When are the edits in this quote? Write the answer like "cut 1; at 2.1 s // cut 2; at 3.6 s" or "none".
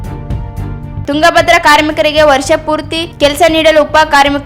cut 1; at 1.0 s